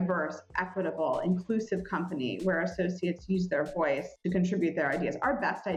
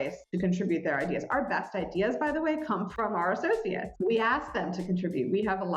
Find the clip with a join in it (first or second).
second